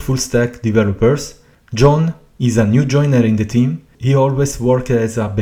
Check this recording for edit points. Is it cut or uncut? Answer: uncut